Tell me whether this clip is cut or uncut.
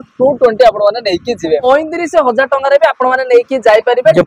cut